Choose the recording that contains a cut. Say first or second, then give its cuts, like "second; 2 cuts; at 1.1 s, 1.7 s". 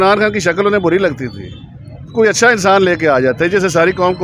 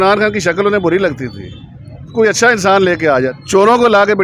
second; 1 cut; at 3.3 s